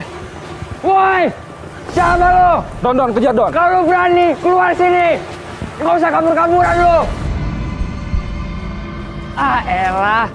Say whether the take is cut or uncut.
cut